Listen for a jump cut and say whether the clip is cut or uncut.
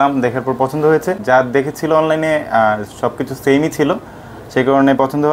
cut